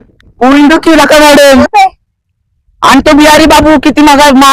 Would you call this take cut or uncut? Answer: cut